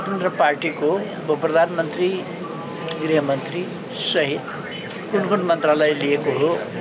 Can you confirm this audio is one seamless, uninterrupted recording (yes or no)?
yes